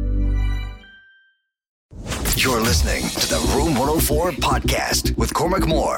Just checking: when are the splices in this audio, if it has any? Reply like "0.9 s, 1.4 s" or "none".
2.0 s